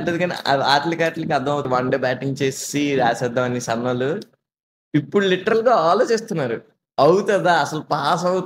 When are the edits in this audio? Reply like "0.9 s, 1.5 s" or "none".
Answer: 1.7 s